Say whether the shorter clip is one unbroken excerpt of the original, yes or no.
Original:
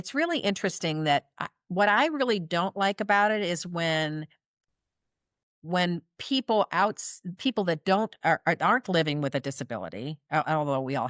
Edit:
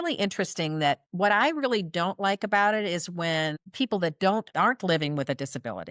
no